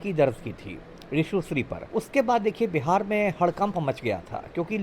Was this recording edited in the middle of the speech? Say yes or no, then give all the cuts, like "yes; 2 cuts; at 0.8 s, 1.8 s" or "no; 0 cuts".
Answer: yes; 1 cut; at 1.8 s